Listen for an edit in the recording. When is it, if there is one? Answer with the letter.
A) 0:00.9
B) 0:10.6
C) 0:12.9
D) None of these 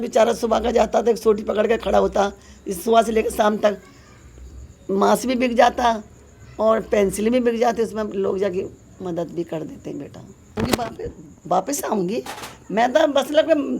B